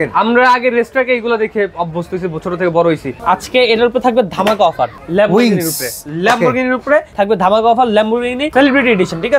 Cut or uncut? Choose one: cut